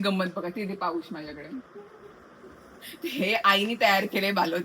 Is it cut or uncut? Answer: uncut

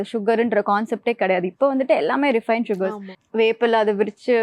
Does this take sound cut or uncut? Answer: cut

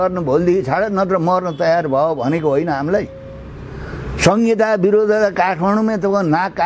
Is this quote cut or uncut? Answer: uncut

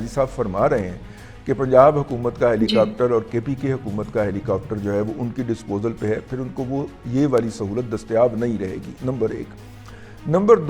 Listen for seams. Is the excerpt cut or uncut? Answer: uncut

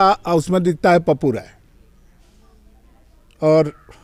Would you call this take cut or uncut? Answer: uncut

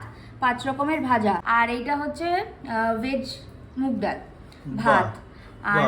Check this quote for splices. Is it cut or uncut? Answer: cut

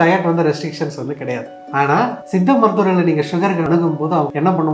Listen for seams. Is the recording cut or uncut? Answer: cut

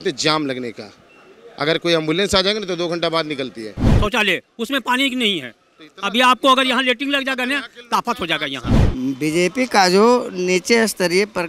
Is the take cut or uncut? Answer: cut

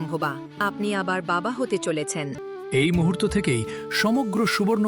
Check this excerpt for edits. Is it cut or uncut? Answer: cut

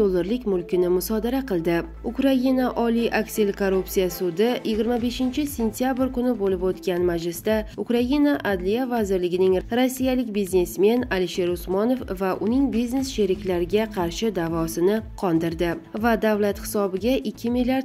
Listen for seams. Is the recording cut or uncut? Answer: uncut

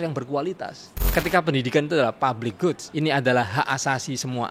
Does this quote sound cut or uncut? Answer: cut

